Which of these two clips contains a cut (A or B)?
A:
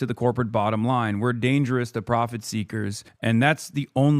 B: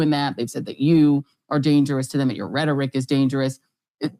A